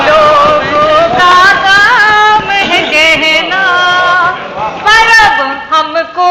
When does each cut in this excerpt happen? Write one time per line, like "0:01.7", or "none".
none

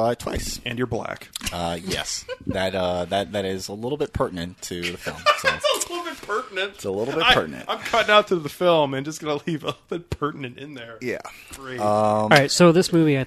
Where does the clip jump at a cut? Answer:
none

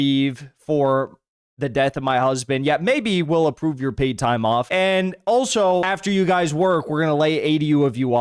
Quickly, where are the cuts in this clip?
0:04.7
0:05.8

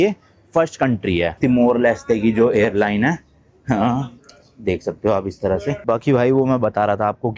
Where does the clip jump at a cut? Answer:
0:01.3
0:05.8

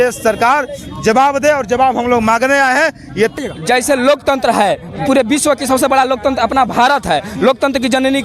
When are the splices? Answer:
0:03.4

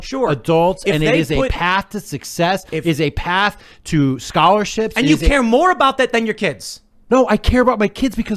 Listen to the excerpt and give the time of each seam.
0:07.3

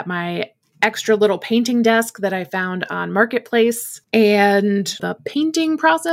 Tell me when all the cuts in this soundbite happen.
0:03.9
0:05.0

